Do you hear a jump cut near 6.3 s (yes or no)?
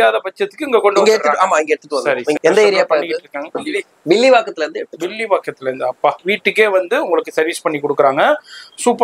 yes